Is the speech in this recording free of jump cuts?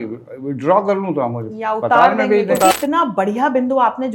no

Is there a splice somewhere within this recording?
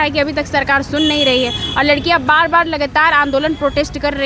no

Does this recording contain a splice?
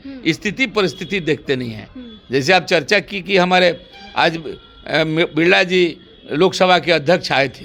no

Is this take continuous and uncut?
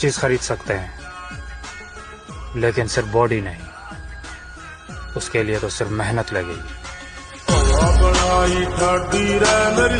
yes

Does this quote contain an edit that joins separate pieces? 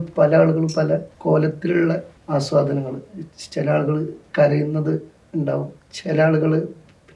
yes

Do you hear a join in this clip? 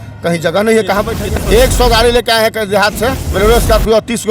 yes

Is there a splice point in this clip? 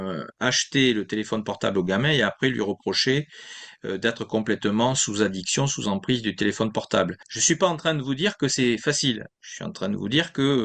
yes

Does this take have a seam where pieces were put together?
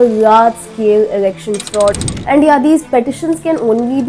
yes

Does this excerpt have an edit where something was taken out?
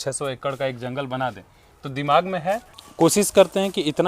yes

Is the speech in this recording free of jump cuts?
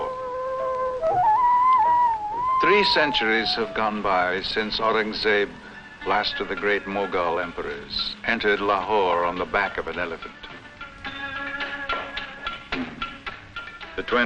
no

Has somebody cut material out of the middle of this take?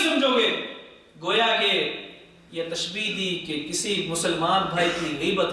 no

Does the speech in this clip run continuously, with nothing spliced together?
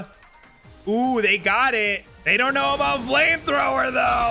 no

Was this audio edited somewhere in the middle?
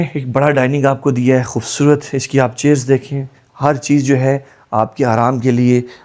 no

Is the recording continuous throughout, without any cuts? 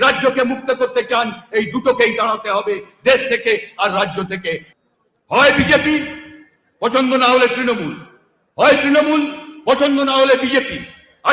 no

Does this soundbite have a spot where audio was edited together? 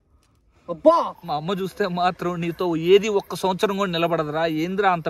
yes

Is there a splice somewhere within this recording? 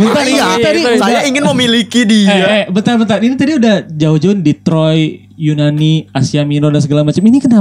no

